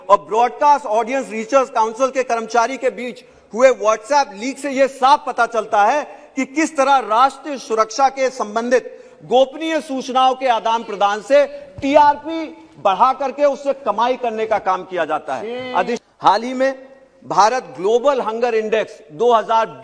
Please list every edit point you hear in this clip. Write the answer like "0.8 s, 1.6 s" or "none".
16.0 s